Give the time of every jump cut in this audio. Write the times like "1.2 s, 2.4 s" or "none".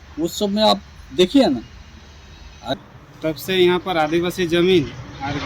2.8 s